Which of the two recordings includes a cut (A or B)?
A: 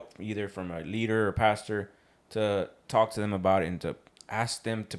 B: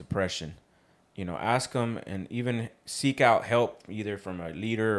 A